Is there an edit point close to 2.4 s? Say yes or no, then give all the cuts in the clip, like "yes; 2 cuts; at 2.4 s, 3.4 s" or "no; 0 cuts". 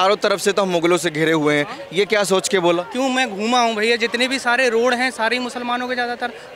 no; 0 cuts